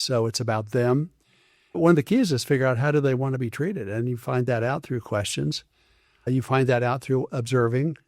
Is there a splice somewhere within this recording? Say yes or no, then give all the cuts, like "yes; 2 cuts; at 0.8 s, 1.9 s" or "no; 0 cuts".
no; 0 cuts